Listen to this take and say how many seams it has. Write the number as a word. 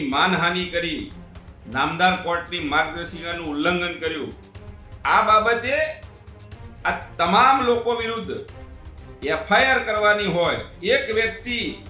one